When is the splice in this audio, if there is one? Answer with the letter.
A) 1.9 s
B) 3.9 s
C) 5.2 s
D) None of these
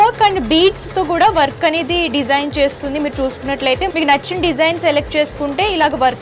B